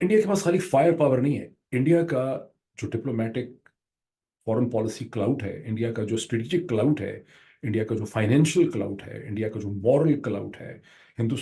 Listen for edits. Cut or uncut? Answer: uncut